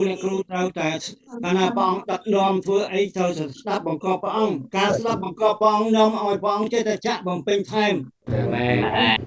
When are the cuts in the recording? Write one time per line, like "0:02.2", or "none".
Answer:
0:08.2

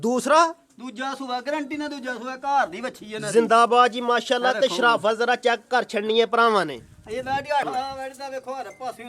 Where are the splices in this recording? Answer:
0:07.6

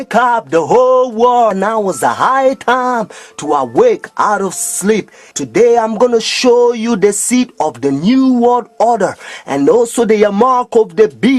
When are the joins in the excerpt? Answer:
0:03.4

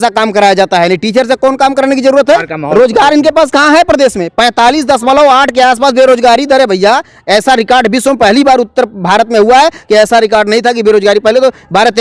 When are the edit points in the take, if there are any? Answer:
0:02.5

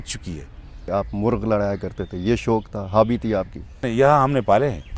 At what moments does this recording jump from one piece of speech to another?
0:00.8
0:03.9

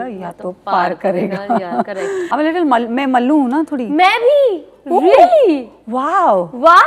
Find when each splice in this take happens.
0:02.3

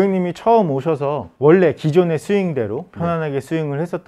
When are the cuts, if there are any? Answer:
0:01.3

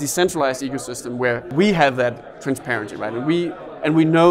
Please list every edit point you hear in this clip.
0:01.5

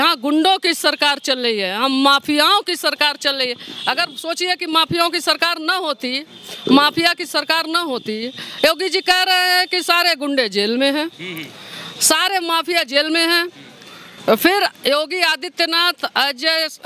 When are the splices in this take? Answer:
none

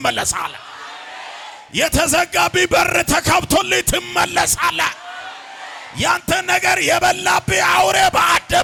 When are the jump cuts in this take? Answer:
none

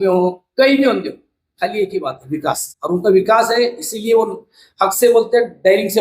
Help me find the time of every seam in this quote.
0:02.7

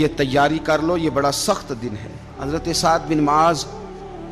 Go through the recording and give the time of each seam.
0:02.3

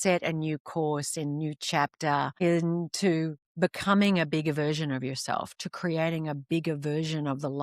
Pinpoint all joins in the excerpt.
0:02.3

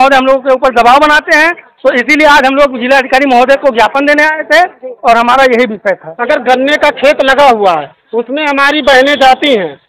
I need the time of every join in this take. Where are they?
0:06.1

